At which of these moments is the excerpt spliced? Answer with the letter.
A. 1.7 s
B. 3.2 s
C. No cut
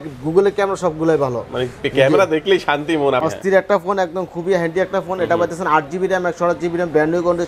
B